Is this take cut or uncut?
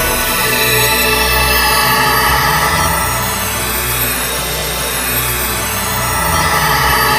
cut